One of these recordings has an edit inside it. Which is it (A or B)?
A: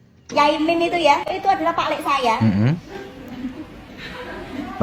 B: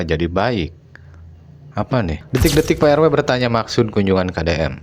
B